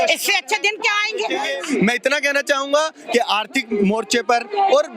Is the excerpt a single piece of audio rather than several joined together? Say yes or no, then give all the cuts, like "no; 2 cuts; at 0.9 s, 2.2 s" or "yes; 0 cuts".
no; 1 cut; at 1.6 s